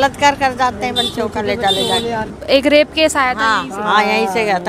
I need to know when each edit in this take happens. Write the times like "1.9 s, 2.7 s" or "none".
2.3 s